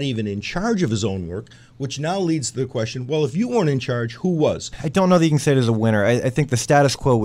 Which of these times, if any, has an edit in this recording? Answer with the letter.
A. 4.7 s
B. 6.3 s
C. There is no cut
A